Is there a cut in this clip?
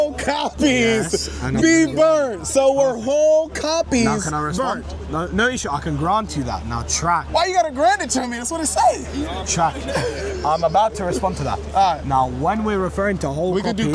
no; 0 cuts

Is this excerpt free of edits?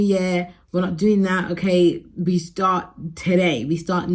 yes; 0 cuts

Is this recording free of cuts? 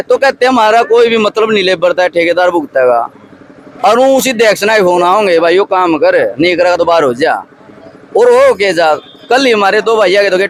yes; 0 cuts

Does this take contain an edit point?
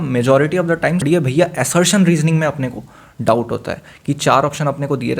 yes; 1 cut; at 1.0 s

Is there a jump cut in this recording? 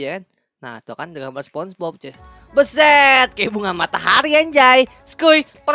no; 0 cuts

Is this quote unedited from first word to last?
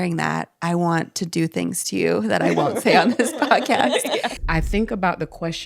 no; 1 cut; at 4.4 s

